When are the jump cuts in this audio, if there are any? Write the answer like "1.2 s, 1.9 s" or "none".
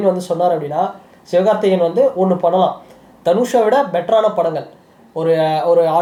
none